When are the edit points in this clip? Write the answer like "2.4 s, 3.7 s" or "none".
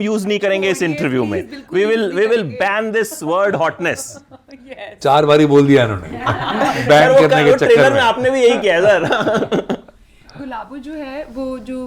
none